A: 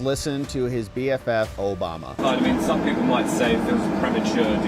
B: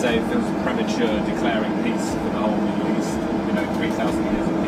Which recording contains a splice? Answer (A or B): A